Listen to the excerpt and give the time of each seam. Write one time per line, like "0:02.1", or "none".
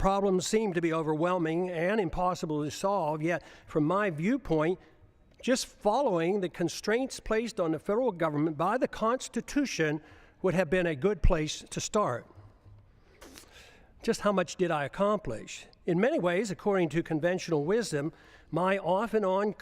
0:05.9